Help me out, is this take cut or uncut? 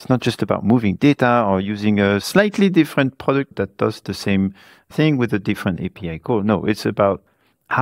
cut